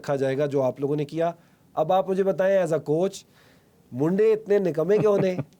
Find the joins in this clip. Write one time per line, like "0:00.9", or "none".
none